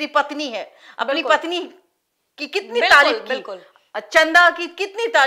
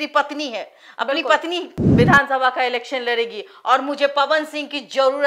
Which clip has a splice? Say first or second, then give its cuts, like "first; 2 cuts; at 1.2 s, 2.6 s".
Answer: second; 1 cut; at 1.8 s